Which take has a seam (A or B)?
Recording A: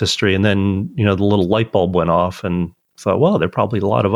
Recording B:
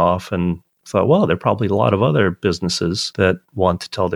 B